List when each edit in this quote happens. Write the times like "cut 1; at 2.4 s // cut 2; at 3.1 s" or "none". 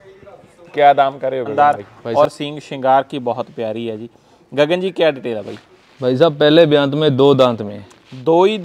cut 1; at 1.5 s